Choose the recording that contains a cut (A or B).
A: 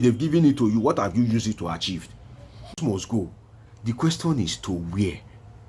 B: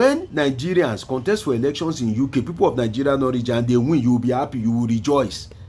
A